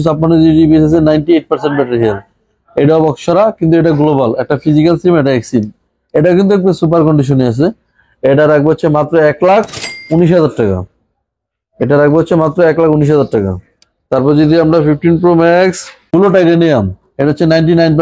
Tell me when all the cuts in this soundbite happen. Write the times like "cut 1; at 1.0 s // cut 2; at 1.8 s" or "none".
none

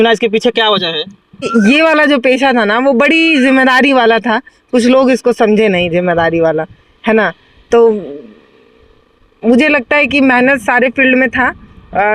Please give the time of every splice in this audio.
cut 1; at 1.5 s

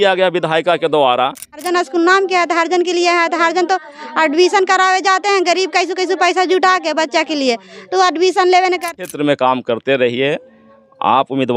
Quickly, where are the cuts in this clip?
cut 1; at 1.6 s // cut 2; at 8.9 s

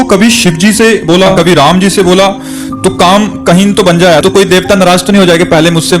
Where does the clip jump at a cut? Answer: cut 1; at 1.3 s // cut 2; at 4.2 s

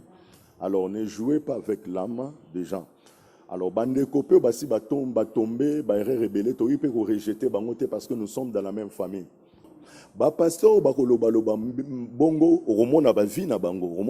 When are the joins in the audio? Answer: cut 1; at 9.6 s

